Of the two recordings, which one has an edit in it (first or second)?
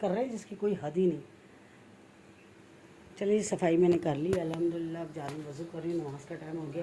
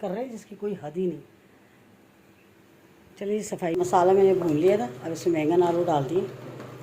second